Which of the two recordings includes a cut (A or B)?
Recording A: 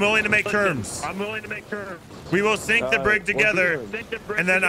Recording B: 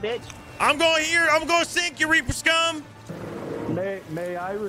B